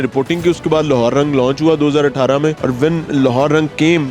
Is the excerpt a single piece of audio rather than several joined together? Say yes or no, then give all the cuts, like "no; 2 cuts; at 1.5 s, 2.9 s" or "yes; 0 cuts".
no; 1 cut; at 2.6 s